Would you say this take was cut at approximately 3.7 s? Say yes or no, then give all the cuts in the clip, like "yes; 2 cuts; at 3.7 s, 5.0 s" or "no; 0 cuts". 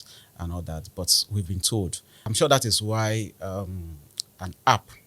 no; 1 cut; at 2.2 s